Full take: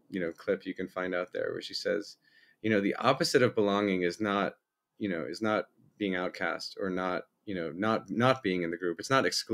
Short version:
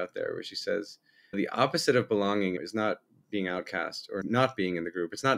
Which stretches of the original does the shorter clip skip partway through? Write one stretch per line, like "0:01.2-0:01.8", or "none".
0:02.5-0:02.8
0:04.0-0:05.2
0:06.9-0:08.1